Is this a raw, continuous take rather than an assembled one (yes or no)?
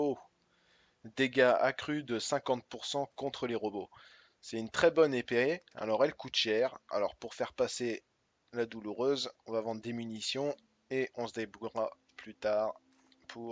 no